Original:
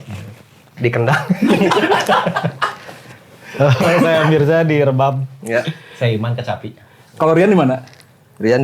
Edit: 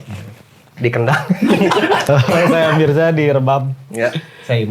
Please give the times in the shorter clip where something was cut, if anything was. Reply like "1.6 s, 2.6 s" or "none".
2.0 s